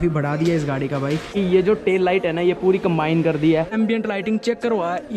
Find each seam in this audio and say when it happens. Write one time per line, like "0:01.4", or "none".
0:01.3
0:03.7